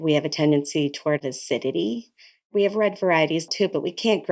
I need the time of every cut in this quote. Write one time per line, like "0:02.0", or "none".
0:01.2
0:02.5
0:03.5